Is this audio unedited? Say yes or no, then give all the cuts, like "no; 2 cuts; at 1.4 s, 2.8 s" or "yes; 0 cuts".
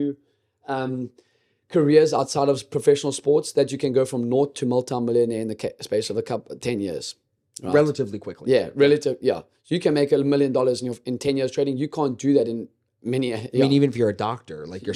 yes; 0 cuts